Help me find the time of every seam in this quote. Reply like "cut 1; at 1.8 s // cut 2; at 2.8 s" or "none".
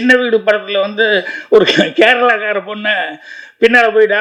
none